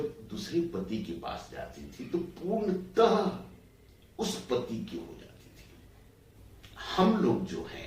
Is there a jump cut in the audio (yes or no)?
yes